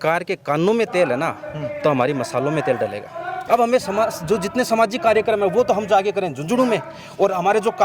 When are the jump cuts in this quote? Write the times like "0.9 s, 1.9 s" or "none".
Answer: 3.4 s